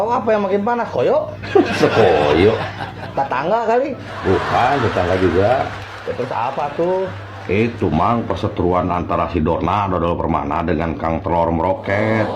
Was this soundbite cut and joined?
no; 0 cuts

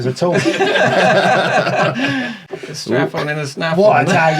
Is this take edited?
yes; 1 cut; at 2.4 s

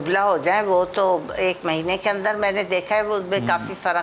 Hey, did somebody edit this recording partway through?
no; 0 cuts

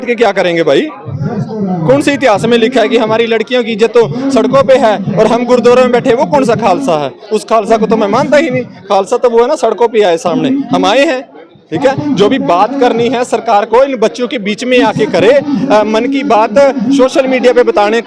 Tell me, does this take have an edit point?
no; 0 cuts

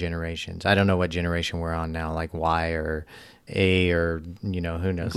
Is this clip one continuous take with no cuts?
yes; 0 cuts

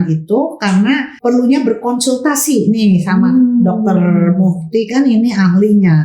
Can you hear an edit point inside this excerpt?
yes; 1 cut; at 1.1 s

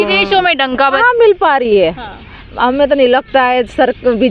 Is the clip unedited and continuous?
no; 1 cut; at 1.0 s

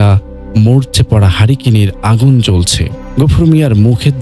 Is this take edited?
no; 0 cuts

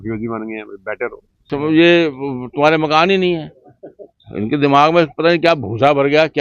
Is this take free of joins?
no; 1 cut; at 1.4 s

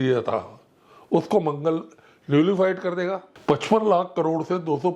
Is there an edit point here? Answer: yes; 1 cut; at 3.3 s

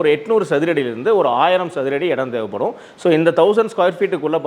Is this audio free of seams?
yes; 0 cuts

